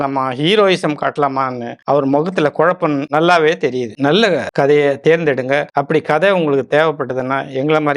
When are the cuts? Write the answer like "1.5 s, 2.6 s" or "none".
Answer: 3.9 s, 5.7 s

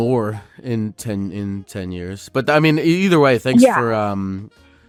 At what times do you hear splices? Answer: none

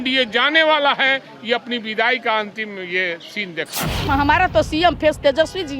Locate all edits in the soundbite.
4.1 s

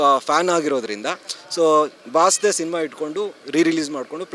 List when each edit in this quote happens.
none

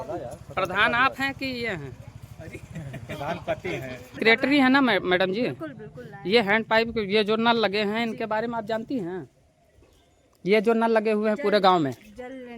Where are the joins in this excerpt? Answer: 4.2 s

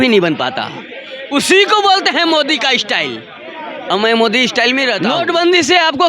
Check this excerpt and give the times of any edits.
5.0 s

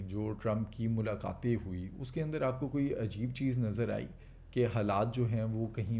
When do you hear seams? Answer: none

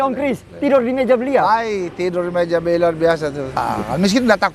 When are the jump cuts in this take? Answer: 3.5 s

